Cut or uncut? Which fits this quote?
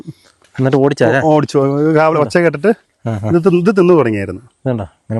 uncut